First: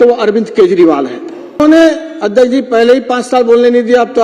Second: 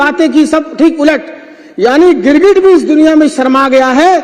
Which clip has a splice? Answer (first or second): first